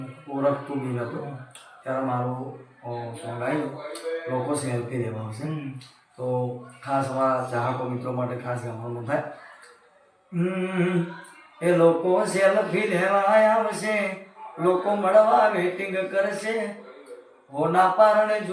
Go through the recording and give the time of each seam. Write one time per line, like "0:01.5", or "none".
none

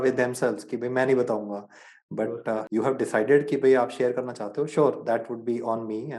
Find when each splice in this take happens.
0:02.7

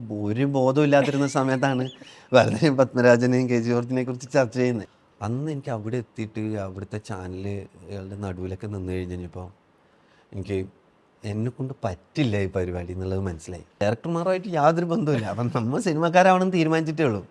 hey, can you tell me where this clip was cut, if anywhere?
0:04.9
0:13.8

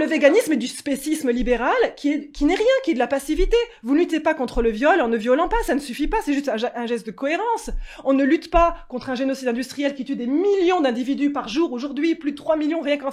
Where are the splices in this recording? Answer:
none

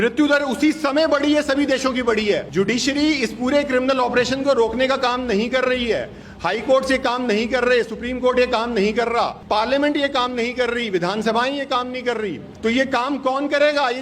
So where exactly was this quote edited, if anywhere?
0:02.5
0:09.4
0:12.5

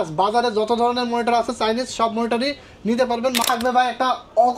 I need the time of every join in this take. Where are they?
0:03.4

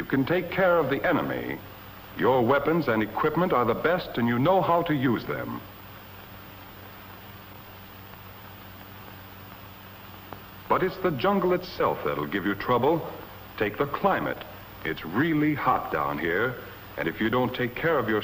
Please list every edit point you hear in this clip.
0:06.0

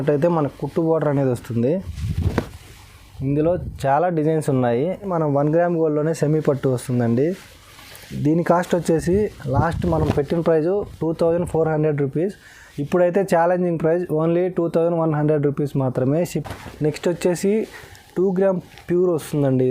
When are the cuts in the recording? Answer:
0:05.1
0:16.3

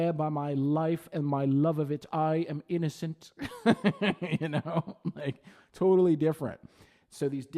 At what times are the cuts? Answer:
none

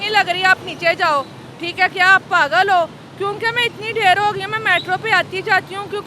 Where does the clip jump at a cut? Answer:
none

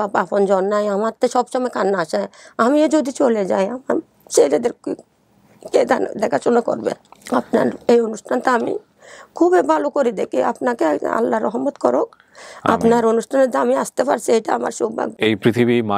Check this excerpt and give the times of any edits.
0:07.1
0:15.1

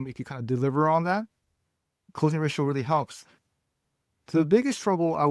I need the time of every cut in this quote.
0:02.0

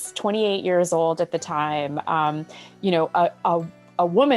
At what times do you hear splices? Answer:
none

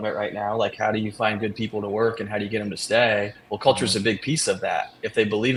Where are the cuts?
none

